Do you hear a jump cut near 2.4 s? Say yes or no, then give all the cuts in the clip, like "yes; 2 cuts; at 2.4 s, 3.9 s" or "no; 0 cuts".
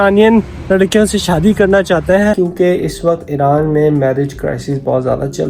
yes; 1 cut; at 2.4 s